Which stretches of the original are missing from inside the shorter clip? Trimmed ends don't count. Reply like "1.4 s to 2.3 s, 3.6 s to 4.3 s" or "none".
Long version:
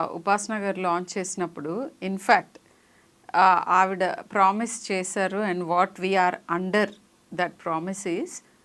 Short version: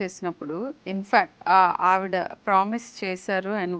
2.5 s to 3.2 s